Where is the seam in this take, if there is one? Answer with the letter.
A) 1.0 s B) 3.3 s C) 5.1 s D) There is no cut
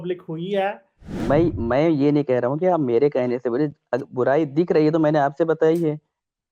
A